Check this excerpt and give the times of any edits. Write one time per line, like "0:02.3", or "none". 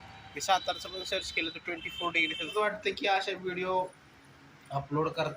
0:02.5